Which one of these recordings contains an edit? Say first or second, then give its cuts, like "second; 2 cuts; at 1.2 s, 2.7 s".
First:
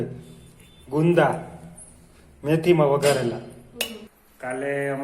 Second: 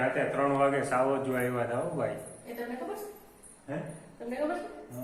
first; 1 cut; at 4.0 s